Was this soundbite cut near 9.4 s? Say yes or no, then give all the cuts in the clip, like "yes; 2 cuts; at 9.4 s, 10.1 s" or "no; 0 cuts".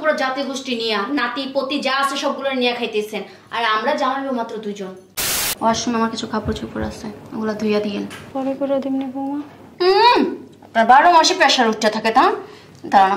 no; 2 cuts; at 5.3 s, 8.2 s